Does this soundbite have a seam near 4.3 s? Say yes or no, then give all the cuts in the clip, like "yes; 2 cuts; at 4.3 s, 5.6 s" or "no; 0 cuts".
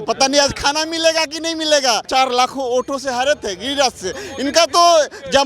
no; 1 cut; at 2.0 s